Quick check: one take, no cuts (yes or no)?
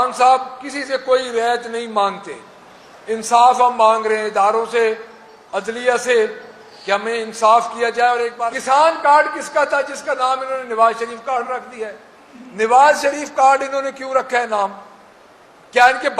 no